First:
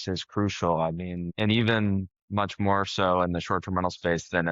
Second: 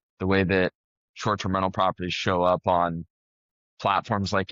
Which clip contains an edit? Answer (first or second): first